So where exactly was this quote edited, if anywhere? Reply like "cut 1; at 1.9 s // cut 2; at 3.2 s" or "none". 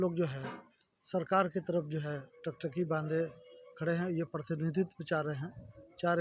none